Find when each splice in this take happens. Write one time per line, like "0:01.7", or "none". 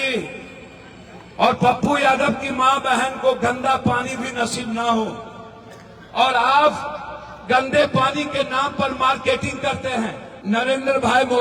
0:10.3